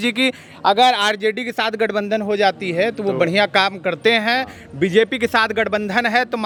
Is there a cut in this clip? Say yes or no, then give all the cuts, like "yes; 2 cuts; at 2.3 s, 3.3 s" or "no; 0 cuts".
no; 0 cuts